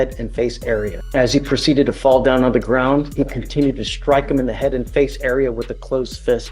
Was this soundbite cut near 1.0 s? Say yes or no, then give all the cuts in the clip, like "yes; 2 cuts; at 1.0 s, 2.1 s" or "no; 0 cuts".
yes; 1 cut; at 1.0 s